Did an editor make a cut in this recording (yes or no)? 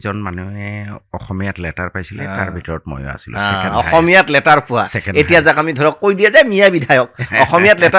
no